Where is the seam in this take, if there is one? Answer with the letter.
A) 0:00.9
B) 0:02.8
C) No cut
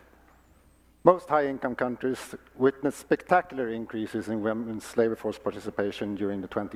C